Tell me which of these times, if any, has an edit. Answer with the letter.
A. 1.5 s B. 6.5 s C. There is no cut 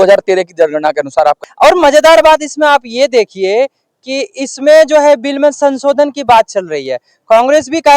A